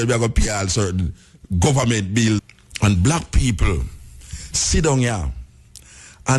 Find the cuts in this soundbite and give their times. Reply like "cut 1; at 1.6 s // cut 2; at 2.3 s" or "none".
cut 1; at 2.5 s